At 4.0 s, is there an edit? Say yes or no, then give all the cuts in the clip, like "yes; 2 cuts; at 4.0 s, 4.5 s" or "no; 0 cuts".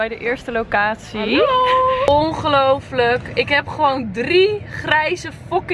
no; 1 cut; at 2.0 s